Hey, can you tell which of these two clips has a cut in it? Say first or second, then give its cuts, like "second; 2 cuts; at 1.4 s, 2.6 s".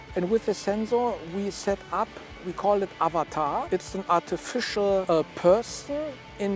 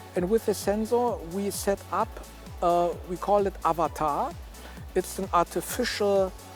first; 3 cuts; at 2.4 s, 3.7 s, 5.0 s